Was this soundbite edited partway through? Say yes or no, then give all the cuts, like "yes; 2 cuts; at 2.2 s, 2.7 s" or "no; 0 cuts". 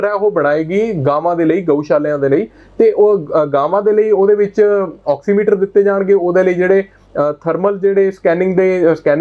no; 0 cuts